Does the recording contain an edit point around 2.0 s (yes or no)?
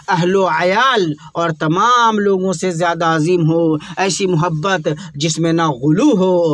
no